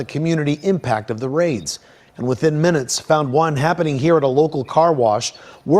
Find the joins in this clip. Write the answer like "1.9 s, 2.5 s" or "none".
none